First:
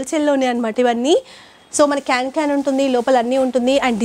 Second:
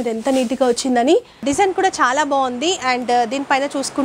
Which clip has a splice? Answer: second; 1 cut; at 1.4 s

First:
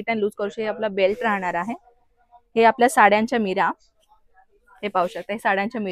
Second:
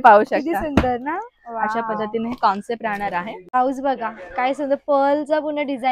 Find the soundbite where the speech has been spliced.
second; 1 cut; at 3.5 s

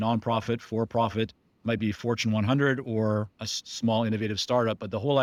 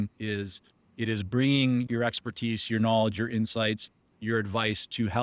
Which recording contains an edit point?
second; 1 cut; at 1.9 s

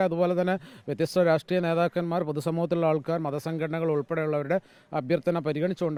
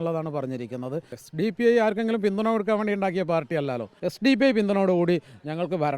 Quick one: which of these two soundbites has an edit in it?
second; 2 cuts; at 1.2 s, 3.9 s

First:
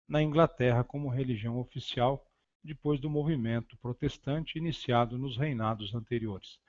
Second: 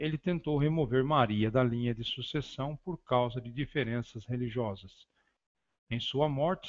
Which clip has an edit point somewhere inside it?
first; 1 cut; at 5.7 s

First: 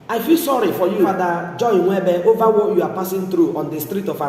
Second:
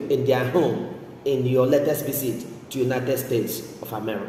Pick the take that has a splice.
first; 1 cut; at 1.1 s

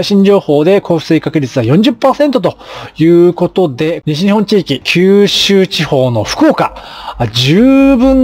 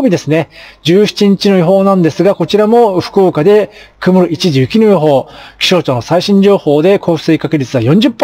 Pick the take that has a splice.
first; 2 cuts; at 3.9 s, 4.9 s

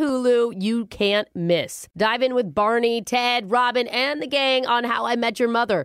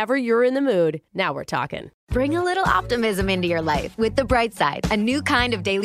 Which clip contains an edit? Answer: second; 1 cut; at 1.9 s

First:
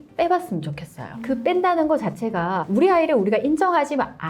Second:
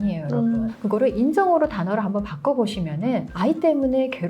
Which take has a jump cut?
second; 1 cut; at 3.3 s

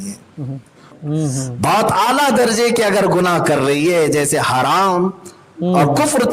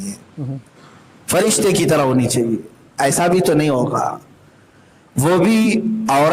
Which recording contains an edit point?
first; 1 cut; at 1.0 s

